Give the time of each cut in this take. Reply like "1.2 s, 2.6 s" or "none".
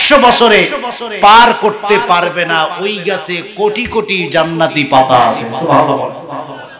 none